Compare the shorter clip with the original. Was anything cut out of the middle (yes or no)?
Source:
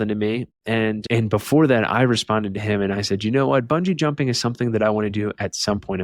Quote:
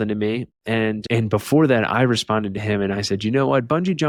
no